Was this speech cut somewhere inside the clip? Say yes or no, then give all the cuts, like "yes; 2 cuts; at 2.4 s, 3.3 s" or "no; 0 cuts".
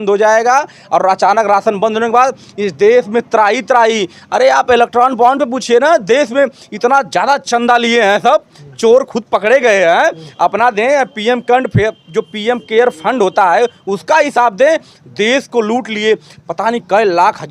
no; 0 cuts